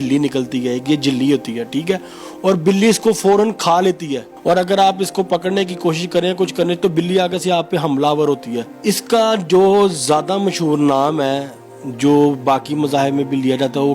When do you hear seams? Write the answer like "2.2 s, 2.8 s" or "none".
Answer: 4.3 s, 8.7 s